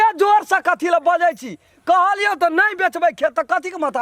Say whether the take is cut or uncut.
uncut